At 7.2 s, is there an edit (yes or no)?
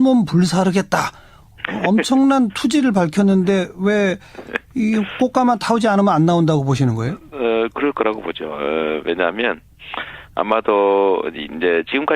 no